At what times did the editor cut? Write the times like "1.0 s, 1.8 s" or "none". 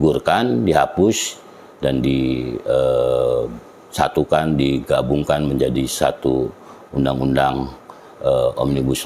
none